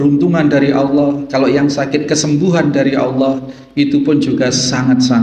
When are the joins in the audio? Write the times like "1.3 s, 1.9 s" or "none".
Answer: none